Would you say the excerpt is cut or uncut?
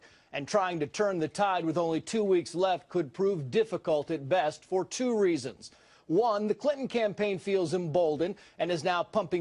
cut